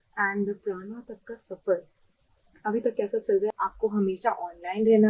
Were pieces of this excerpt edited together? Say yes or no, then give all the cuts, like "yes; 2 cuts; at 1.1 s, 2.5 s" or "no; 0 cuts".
yes; 1 cut; at 3.5 s